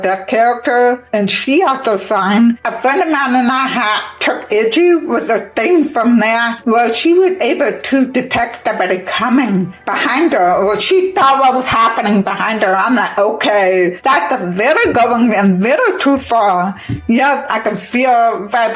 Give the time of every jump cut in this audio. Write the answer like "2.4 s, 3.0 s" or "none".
6.5 s, 14.0 s